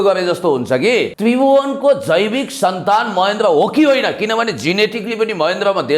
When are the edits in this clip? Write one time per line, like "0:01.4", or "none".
0:01.1

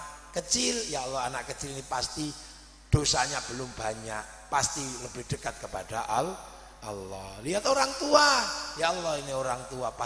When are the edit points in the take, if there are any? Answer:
0:03.2

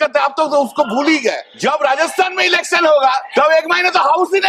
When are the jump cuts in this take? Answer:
0:01.5
0:03.2

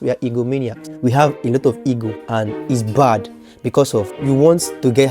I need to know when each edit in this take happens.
0:01.2
0:02.2
0:04.2

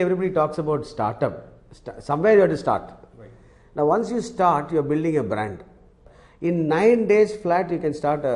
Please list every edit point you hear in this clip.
0:06.0

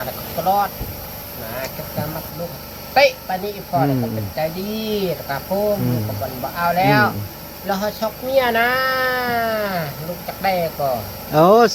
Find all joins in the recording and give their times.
none

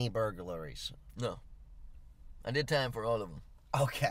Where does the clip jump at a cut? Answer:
none

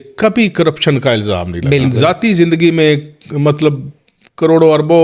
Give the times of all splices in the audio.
0:01.9

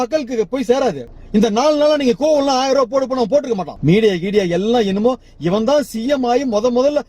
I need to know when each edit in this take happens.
0:01.0
0:03.7

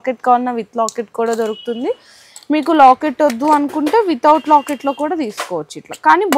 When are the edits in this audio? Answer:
none

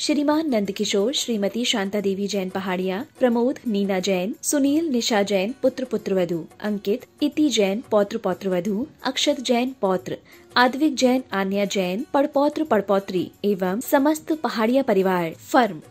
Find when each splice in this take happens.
none

